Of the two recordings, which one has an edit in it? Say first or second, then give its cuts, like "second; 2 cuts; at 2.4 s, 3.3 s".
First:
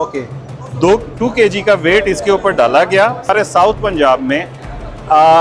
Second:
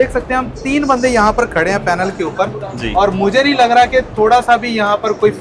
first; 1 cut; at 3.2 s